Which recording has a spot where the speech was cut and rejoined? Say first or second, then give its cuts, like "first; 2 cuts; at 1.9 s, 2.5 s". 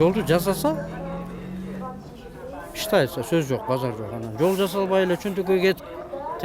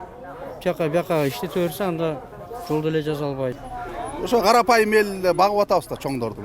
second; 1 cut; at 3.6 s